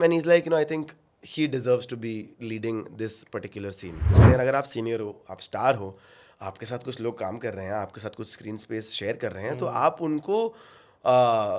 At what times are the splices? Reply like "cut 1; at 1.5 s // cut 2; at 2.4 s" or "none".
cut 1; at 4.2 s